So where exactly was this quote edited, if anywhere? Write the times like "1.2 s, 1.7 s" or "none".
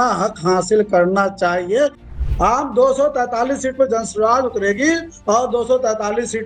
2.1 s